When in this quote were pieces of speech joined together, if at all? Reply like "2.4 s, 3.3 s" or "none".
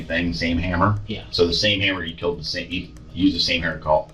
none